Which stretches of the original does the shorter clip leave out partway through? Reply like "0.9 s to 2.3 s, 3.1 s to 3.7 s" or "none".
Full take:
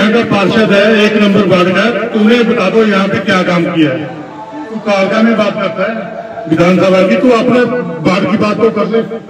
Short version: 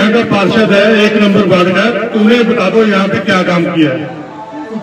none

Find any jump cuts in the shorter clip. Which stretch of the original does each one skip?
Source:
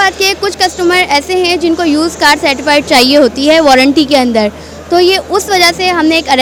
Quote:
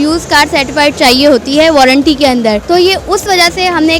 4.5 s to 4.8 s

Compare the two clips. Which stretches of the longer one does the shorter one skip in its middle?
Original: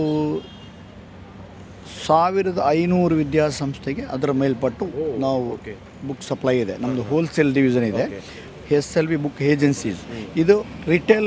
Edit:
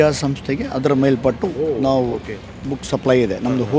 none

